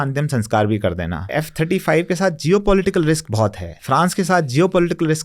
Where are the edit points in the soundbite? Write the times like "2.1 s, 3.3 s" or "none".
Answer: 1.2 s, 3.7 s